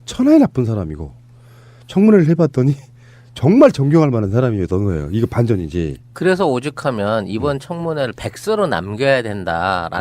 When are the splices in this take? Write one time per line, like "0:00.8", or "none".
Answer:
0:05.1

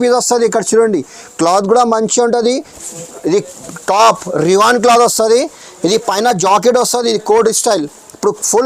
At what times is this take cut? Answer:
0:02.7

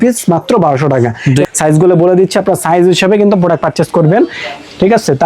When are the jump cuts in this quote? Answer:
0:01.5

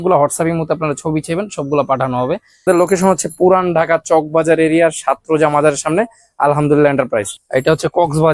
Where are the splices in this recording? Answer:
0:02.7
0:07.4

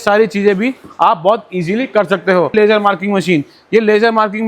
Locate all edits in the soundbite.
0:02.5

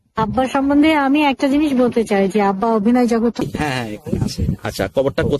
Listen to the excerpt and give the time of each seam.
0:03.4

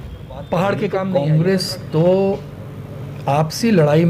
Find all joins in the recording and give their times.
0:01.1

